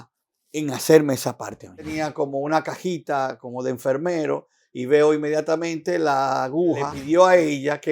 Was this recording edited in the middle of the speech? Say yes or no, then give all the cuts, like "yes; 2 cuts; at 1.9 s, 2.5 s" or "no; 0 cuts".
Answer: yes; 2 cuts; at 2.0 s, 7.0 s